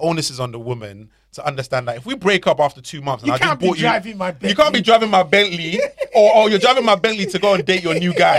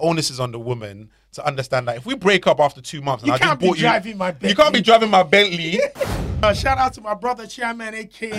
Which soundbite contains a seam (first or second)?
second